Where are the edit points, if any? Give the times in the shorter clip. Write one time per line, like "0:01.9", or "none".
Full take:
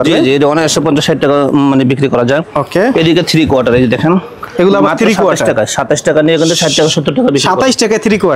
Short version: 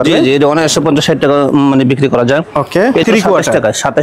0:03.0

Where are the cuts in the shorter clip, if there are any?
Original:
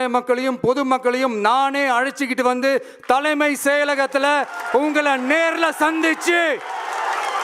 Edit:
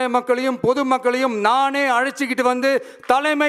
none

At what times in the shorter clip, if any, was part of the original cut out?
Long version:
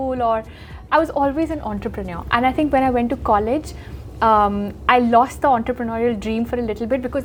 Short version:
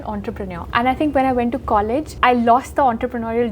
0:02.1

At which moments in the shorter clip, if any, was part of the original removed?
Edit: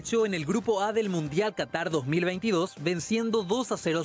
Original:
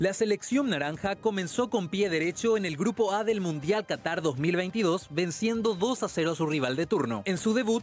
none

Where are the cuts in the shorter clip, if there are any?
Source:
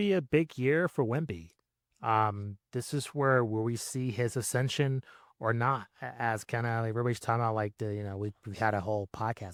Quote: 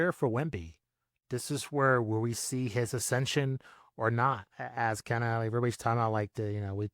0:01.1

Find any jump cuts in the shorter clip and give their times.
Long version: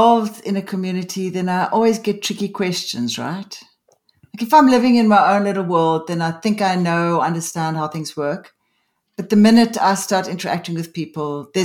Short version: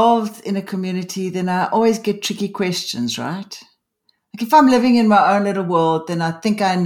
none

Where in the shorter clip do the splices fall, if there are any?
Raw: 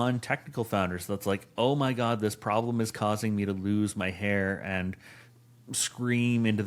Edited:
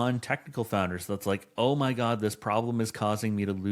none

